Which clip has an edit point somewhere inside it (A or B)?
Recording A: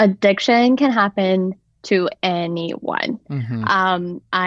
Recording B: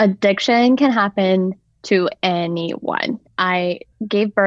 B